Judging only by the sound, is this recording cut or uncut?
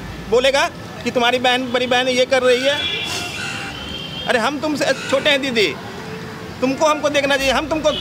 uncut